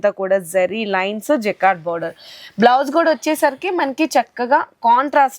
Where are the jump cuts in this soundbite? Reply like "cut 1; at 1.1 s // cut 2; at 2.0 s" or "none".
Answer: none